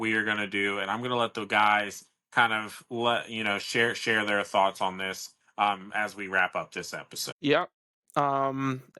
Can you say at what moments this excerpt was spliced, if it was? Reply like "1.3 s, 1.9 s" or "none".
7.2 s